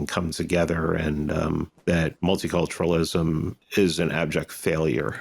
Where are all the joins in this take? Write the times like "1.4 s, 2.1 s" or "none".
1.7 s, 3.6 s

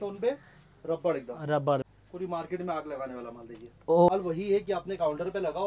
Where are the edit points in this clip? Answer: 1.9 s, 4.1 s

